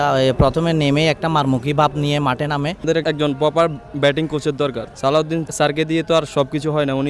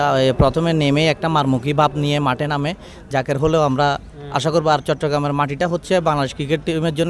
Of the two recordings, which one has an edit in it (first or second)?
first